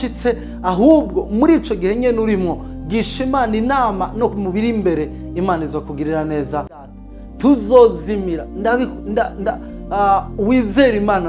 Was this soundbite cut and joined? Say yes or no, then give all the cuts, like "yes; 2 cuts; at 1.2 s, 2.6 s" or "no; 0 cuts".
yes; 1 cut; at 6.9 s